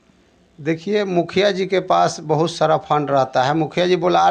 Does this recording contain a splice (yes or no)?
no